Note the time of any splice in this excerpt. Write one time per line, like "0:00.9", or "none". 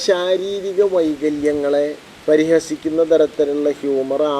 0:02.1